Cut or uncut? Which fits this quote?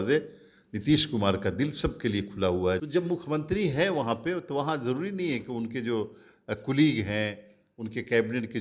cut